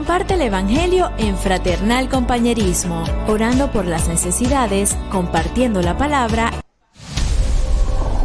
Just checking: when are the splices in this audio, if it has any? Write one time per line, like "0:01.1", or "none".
0:06.6